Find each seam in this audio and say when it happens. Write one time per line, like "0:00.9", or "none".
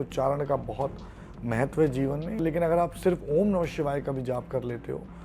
0:02.4